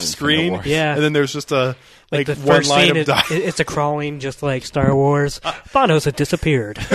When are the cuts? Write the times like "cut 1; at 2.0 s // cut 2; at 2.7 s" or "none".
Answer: none